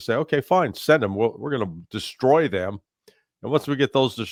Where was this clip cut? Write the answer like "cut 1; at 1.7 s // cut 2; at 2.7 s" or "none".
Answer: none